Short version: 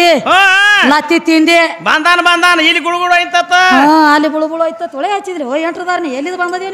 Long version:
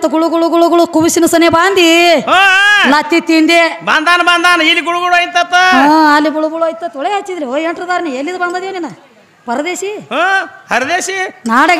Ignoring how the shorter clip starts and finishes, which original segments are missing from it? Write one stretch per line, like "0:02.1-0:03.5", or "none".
none